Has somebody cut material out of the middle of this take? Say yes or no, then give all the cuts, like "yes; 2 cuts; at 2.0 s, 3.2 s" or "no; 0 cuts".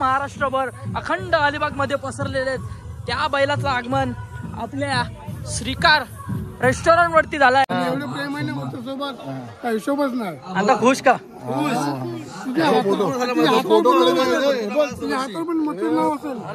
yes; 1 cut; at 7.7 s